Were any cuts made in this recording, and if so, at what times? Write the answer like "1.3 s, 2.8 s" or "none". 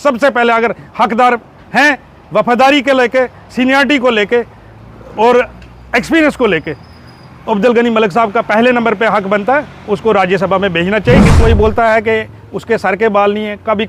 11.3 s